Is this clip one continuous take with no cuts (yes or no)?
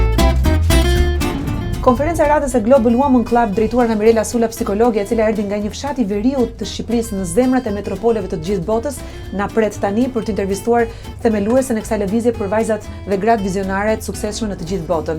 no